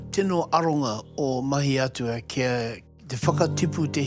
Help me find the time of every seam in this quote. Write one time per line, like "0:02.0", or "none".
0:02.8